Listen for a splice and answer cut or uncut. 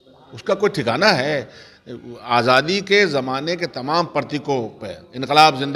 uncut